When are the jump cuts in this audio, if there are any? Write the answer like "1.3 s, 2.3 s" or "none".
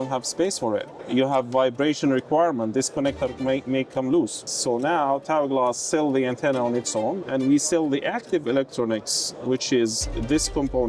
1.0 s, 4.5 s, 7.2 s